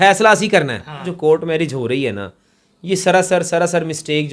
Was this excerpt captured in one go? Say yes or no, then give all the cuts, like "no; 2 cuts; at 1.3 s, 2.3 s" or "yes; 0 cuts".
no; 1 cut; at 1.1 s